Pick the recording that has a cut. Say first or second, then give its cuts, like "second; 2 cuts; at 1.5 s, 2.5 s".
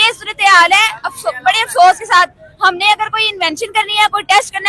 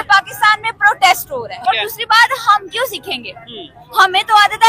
second; 1 cut; at 1.5 s